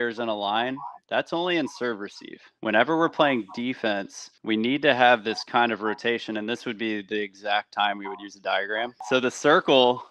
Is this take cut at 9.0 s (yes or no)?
yes